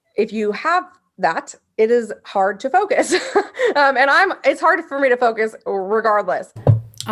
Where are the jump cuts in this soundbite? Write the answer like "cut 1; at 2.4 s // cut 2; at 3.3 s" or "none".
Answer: none